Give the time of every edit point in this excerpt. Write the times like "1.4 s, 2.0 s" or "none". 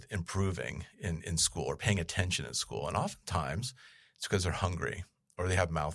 none